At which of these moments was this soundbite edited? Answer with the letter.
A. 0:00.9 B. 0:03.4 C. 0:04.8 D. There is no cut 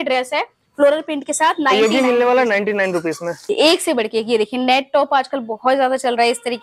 B